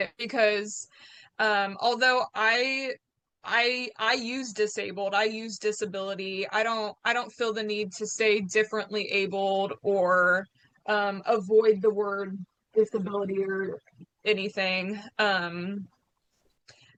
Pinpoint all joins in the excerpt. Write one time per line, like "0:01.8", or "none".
none